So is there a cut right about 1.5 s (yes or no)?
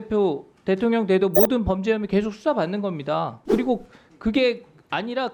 no